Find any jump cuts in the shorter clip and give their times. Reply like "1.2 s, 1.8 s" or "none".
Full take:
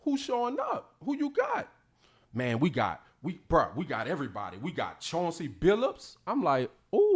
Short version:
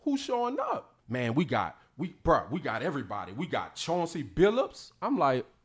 0.9 s